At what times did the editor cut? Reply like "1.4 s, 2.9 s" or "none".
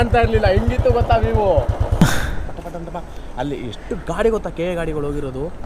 2.0 s